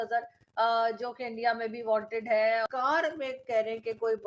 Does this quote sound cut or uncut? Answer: cut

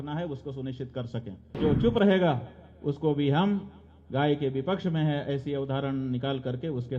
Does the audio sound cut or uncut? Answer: cut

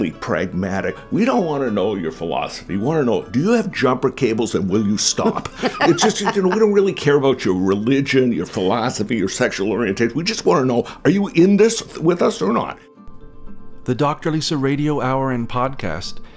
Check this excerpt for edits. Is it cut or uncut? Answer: cut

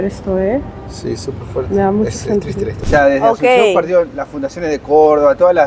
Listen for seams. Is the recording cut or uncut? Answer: cut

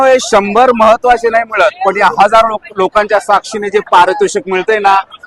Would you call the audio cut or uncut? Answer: uncut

